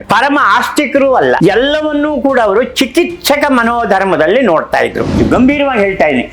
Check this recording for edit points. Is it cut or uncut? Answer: cut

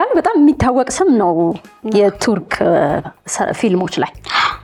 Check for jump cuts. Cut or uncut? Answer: uncut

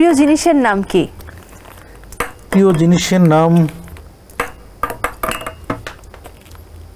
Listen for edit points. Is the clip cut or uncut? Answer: uncut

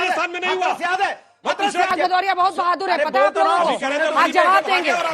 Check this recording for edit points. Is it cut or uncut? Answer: cut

